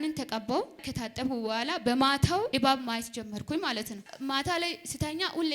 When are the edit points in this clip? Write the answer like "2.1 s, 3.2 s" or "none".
0.9 s, 2.5 s, 4.1 s